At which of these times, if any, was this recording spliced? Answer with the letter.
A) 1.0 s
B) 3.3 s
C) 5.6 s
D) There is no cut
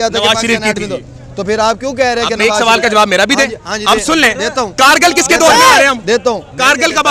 D